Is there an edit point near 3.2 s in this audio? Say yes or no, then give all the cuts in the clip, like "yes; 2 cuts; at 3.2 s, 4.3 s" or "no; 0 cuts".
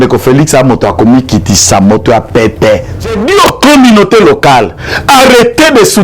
yes; 1 cut; at 3.2 s